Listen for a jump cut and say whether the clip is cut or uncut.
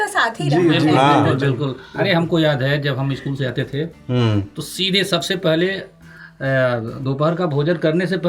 uncut